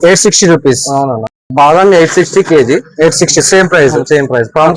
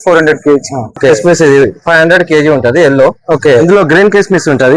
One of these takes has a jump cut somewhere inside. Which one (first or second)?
second